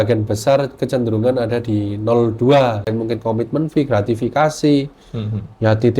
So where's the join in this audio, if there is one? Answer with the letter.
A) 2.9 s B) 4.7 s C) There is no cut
A